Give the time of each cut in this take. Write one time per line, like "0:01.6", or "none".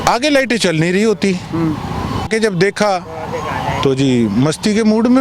0:02.3